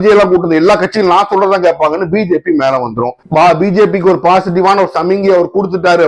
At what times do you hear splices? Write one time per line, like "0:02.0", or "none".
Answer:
0:03.2